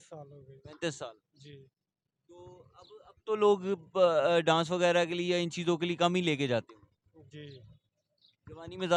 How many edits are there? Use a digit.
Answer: 0